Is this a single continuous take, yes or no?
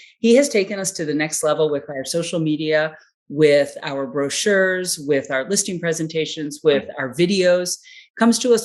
yes